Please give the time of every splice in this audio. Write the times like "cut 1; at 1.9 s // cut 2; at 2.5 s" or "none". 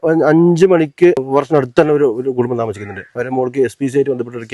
cut 1; at 1.2 s